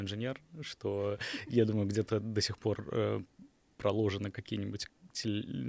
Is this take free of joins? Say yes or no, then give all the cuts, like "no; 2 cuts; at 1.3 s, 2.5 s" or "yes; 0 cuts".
yes; 0 cuts